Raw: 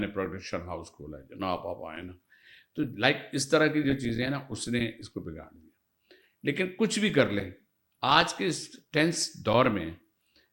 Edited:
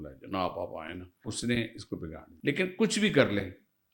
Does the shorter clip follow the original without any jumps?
no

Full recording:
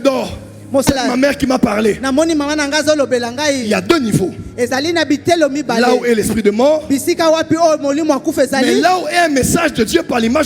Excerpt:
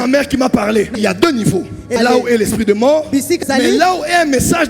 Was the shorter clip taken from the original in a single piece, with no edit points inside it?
no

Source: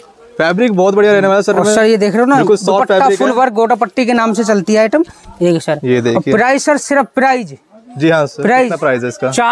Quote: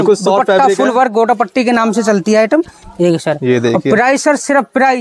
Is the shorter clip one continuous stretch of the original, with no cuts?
yes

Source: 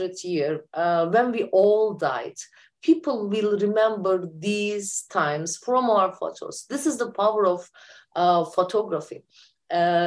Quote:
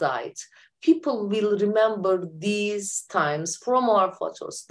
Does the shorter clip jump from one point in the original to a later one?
no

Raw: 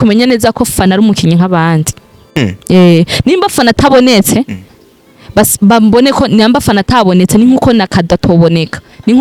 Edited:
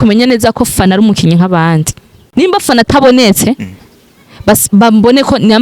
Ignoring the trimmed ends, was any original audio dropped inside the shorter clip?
yes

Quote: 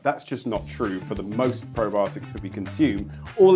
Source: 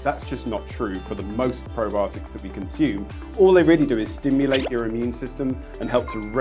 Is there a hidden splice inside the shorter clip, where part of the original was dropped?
no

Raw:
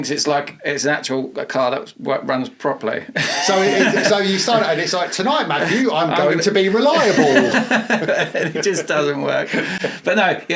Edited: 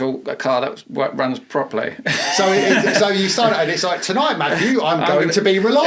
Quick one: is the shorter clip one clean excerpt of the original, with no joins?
yes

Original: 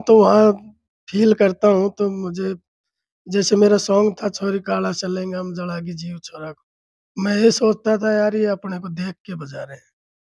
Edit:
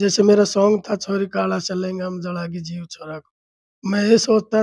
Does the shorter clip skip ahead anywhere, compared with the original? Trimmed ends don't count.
no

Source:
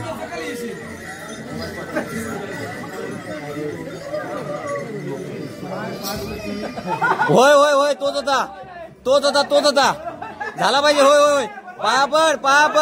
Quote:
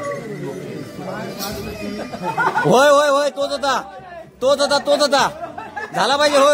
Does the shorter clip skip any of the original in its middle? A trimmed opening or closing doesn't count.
no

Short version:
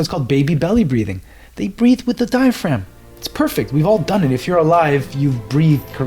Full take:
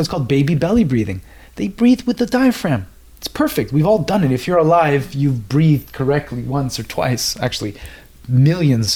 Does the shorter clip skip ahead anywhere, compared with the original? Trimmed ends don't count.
no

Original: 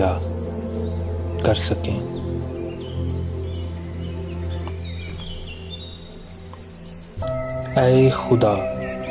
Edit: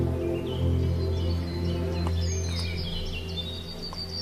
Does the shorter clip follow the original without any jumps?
yes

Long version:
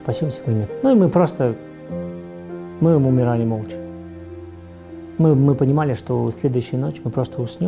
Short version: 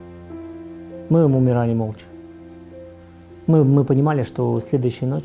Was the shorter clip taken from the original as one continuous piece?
yes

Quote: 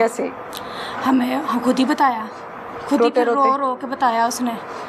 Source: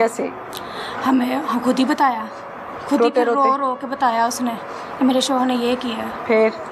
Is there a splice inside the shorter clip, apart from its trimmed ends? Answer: no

